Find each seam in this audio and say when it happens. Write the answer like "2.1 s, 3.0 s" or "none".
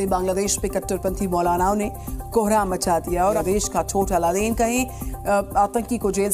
3.4 s